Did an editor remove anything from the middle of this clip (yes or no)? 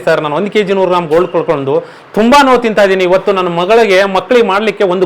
no